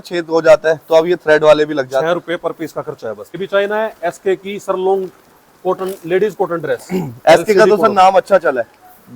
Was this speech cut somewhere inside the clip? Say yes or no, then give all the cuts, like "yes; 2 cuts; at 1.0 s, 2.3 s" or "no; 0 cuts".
yes; 1 cut; at 3.4 s